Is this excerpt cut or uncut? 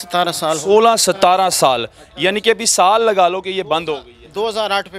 uncut